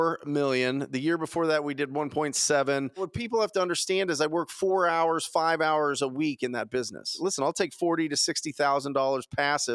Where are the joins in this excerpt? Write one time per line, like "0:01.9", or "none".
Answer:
0:03.1
0:07.1